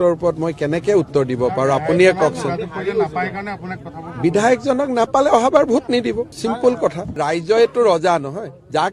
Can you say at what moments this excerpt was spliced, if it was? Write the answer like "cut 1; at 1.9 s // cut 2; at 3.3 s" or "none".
none